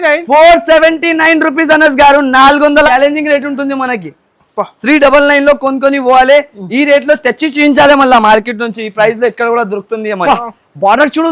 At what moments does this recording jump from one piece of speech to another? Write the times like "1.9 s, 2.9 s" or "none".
2.9 s, 10.2 s